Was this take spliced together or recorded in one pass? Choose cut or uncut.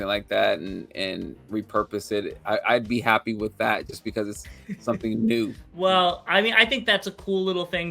cut